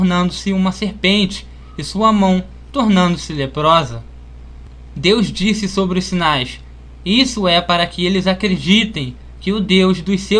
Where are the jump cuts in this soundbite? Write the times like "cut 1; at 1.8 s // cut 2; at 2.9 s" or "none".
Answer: cut 1; at 4.8 s